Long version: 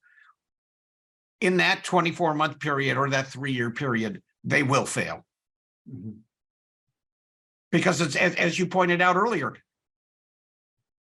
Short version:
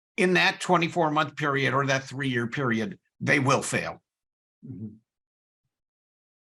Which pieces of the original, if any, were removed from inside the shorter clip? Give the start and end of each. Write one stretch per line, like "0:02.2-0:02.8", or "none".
none